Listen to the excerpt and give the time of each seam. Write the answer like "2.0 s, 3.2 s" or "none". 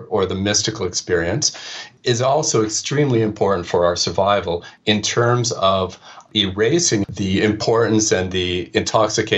4.7 s, 6.3 s, 7.1 s